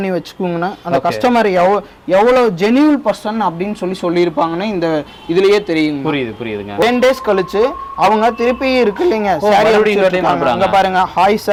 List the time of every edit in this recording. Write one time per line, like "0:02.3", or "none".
none